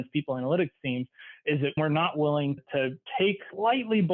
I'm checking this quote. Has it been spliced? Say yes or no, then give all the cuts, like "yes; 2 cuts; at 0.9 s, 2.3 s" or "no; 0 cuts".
yes; 1 cut; at 1.8 s